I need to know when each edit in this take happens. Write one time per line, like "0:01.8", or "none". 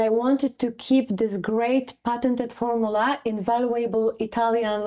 none